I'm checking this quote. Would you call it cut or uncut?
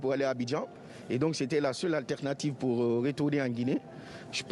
uncut